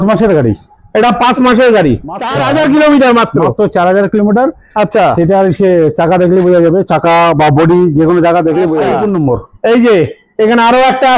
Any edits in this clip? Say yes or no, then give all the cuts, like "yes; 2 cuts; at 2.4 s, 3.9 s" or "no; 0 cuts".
yes; 2 cuts; at 2.3 s, 8.9 s